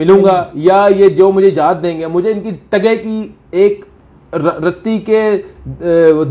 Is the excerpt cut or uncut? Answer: uncut